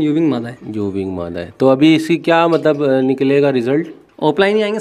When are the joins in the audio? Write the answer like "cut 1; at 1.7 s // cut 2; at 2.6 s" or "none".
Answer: none